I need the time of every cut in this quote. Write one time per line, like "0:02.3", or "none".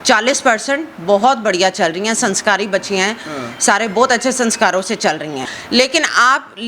0:05.5